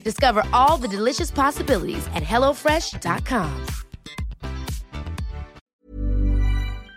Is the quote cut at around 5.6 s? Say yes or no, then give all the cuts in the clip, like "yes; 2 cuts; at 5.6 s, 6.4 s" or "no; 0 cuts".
yes; 1 cut; at 5.6 s